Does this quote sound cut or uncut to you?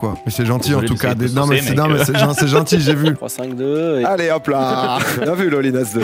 cut